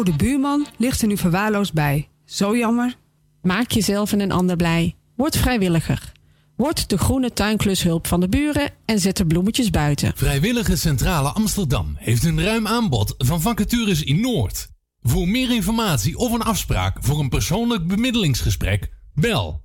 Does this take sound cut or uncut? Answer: cut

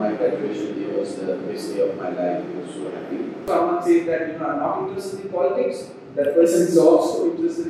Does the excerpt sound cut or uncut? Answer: cut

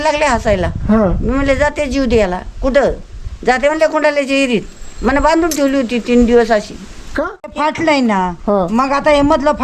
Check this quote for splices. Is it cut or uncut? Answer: cut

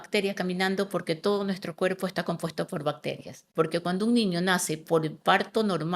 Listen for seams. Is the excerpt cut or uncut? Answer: cut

